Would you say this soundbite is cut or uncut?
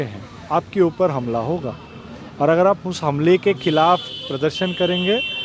uncut